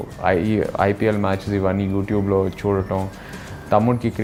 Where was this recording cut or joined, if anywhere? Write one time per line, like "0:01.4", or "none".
none